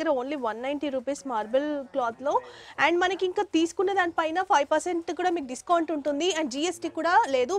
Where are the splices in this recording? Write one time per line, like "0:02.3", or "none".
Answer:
none